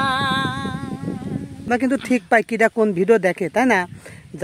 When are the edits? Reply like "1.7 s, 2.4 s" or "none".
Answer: 1.7 s